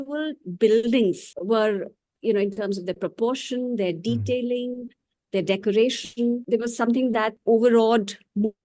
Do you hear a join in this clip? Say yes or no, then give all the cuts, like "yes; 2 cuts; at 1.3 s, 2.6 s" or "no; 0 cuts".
yes; 3 cuts; at 1.3 s, 6.4 s, 7.4 s